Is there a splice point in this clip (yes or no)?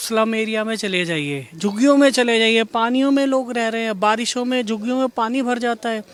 no